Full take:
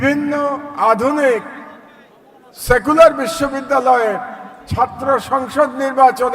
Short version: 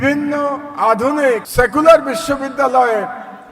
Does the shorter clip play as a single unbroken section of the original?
no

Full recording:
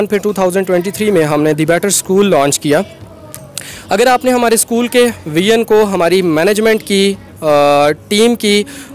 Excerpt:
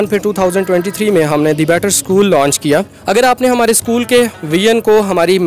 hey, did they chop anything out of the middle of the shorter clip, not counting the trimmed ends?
yes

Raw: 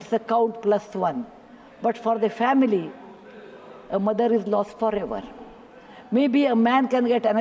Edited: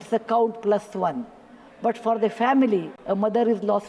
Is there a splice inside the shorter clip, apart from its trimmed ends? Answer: yes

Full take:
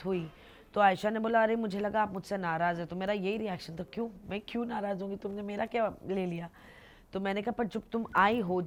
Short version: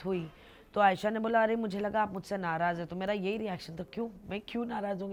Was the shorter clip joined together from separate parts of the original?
no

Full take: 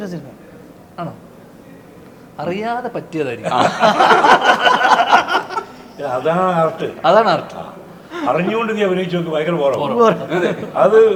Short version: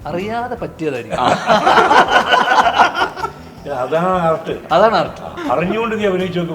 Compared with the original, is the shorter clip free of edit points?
no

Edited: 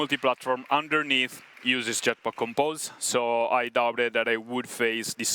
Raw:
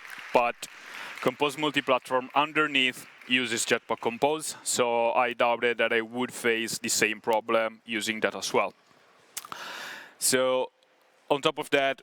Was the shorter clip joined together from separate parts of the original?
no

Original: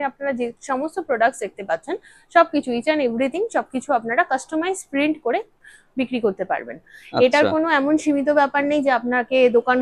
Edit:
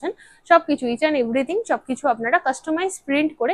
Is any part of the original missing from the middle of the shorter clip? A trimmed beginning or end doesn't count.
no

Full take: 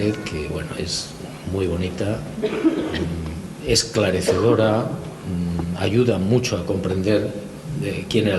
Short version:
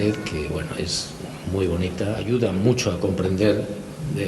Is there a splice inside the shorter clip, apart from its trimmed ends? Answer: yes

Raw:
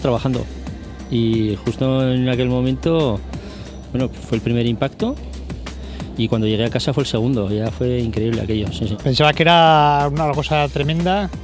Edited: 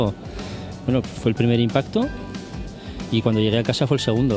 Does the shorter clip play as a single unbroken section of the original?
yes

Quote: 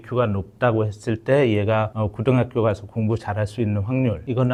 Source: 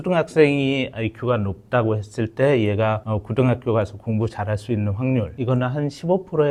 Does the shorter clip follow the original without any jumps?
yes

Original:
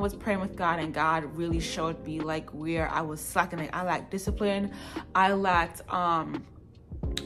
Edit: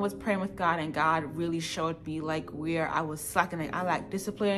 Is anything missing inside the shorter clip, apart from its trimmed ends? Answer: no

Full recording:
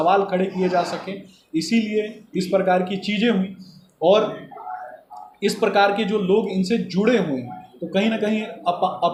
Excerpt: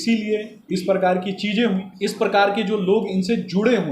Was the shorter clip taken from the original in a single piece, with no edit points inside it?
no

